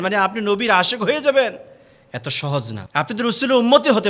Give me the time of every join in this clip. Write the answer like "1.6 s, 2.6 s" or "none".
2.8 s